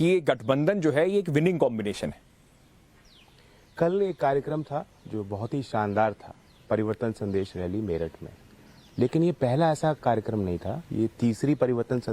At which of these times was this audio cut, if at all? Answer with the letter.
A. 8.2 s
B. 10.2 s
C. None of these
B